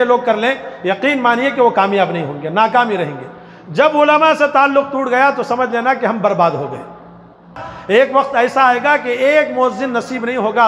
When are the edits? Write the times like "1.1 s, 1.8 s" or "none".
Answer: 7.7 s